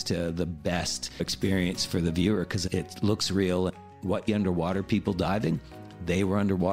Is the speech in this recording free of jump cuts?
no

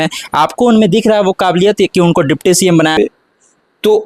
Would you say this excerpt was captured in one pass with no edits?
no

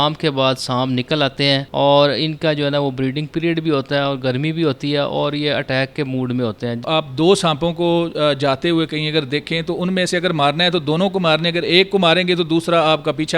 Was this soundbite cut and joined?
yes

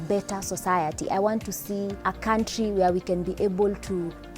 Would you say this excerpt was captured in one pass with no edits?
no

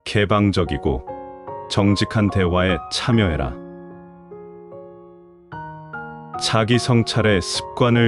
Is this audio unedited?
no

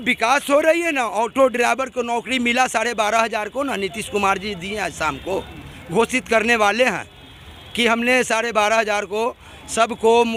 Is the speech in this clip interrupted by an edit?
no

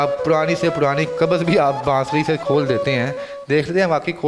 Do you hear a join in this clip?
no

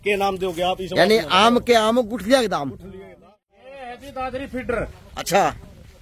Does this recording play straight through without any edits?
no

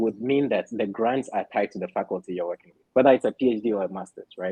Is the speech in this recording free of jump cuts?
yes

